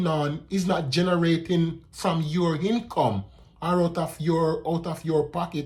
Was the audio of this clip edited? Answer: no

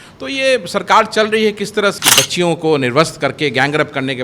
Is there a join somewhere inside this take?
yes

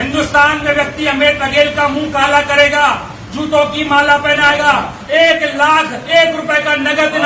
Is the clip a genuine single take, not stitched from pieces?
yes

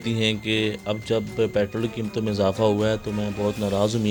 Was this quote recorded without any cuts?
yes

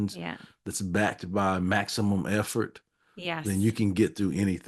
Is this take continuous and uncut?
yes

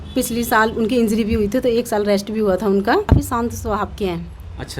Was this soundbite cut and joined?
yes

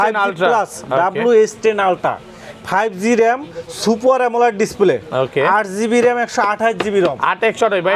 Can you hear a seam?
no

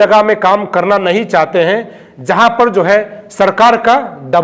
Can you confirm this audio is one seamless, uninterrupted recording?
yes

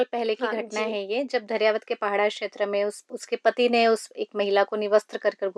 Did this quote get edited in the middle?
yes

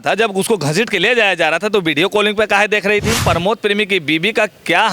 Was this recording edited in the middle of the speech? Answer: yes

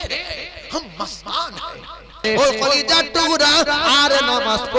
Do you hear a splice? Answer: yes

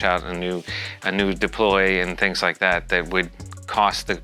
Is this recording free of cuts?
yes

